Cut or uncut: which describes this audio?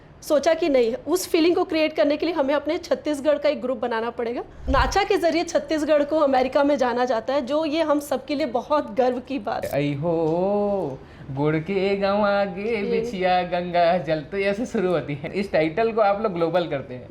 cut